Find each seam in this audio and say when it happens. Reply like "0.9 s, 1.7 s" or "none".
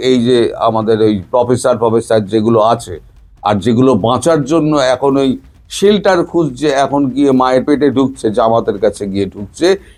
none